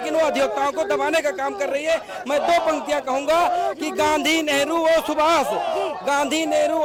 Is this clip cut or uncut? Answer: uncut